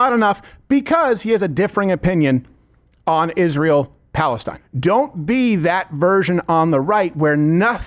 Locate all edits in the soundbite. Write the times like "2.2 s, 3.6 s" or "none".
4.6 s